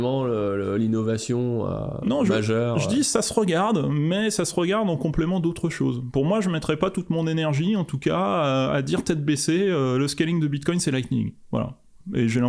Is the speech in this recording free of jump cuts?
yes; 0 cuts

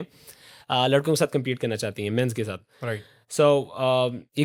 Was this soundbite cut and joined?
no; 0 cuts

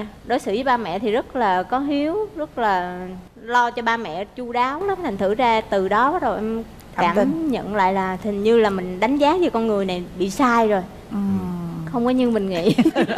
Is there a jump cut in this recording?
no; 0 cuts

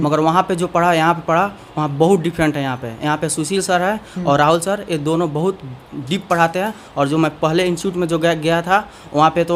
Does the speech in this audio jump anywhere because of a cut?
no; 0 cuts

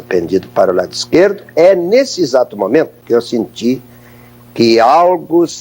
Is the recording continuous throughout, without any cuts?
no; 1 cut; at 3.0 s

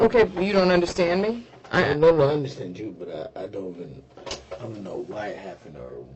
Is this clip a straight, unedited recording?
yes; 0 cuts

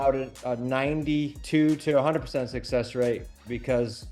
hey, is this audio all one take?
no; 1 cut; at 1.4 s

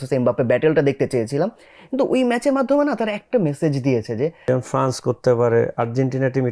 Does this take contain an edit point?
yes; 1 cut; at 4.5 s

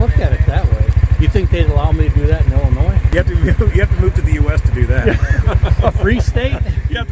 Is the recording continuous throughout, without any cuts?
no; 2 cuts; at 1.0 s, 3.0 s

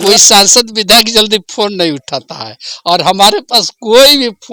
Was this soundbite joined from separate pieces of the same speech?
no; 0 cuts

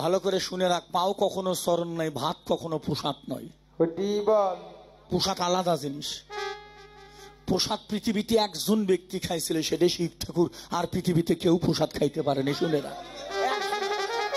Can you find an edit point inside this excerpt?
no; 0 cuts

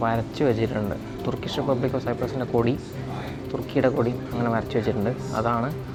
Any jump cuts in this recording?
no; 0 cuts

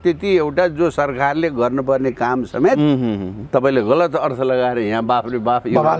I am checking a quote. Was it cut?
no; 0 cuts

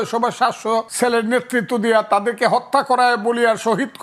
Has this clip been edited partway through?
yes; 1 cut; at 0.9 s

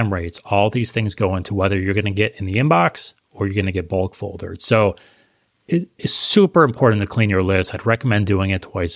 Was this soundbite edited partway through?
no; 0 cuts

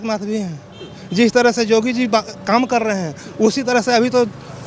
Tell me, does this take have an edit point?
no; 0 cuts

